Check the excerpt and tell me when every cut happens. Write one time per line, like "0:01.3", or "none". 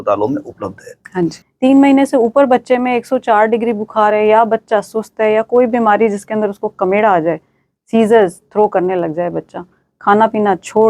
0:01.4